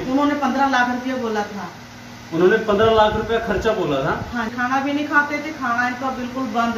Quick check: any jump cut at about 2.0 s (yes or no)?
no